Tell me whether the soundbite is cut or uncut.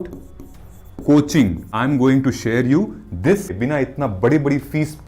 cut